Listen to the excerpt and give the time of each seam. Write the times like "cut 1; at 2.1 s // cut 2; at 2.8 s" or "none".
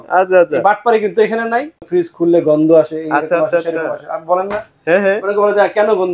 cut 1; at 1.8 s